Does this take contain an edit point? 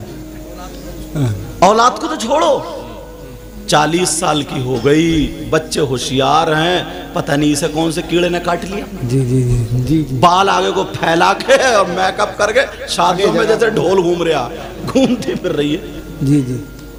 no; 0 cuts

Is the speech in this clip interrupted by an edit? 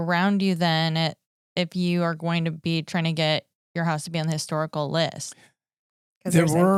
no; 0 cuts

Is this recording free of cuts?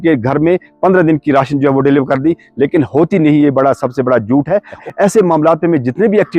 no; 1 cut; at 4.8 s

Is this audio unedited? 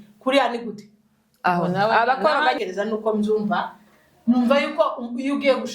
no; 1 cut; at 2.6 s

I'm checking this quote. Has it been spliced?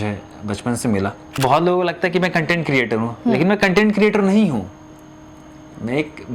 yes; 1 cut; at 1.3 s

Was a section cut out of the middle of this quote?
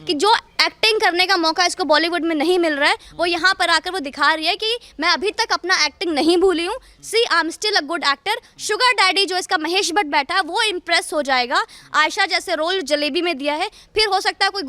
no; 0 cuts

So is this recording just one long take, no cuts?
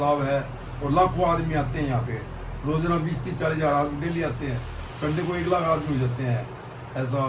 yes; 0 cuts

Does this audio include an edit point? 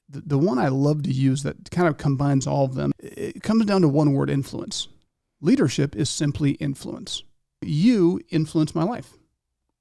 yes; 2 cuts; at 2.9 s, 7.7 s

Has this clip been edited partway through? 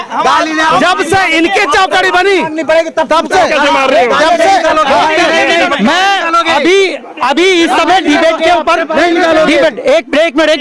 no; 0 cuts

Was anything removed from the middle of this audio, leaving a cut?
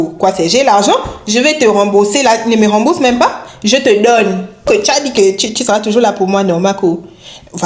yes; 1 cut; at 4.7 s

